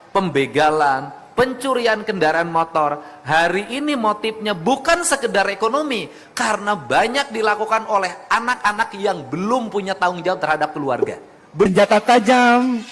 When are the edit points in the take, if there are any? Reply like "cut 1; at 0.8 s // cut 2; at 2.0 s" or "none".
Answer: cut 1; at 11.7 s